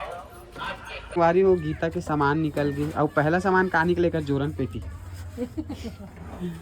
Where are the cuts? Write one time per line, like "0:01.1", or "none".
0:01.1

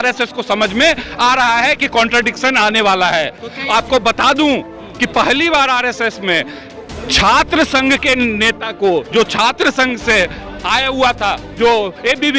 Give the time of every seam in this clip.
none

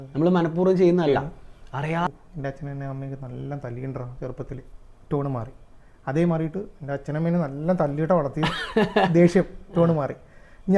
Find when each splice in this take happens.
0:02.1

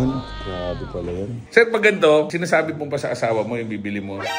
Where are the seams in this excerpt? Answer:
0:01.4

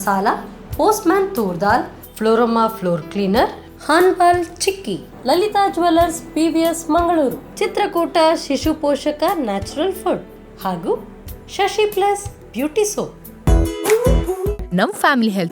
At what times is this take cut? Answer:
0:13.2

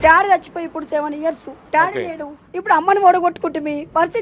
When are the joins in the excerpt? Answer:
none

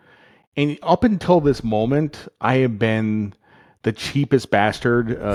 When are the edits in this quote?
none

